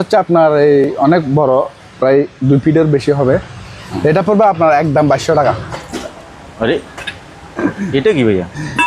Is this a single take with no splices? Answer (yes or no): no